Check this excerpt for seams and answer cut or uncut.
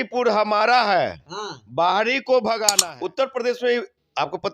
cut